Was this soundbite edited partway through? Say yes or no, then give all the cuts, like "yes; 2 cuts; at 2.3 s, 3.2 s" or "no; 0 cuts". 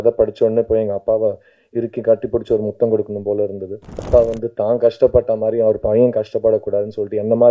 yes; 1 cut; at 4.0 s